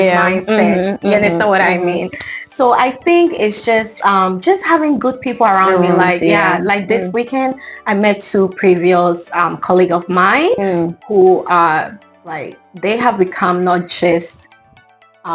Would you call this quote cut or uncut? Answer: uncut